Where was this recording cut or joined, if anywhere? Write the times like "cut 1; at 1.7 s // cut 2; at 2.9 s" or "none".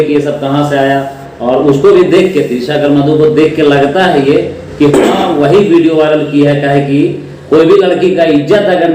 none